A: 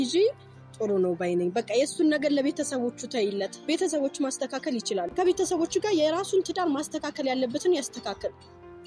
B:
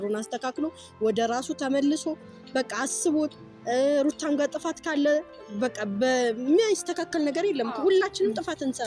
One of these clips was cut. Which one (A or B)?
A